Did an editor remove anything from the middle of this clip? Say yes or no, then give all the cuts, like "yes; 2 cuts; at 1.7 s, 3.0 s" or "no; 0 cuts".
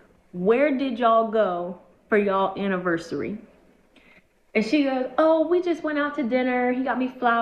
no; 0 cuts